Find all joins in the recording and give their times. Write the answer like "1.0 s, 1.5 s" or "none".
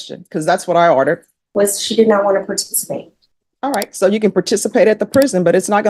1.3 s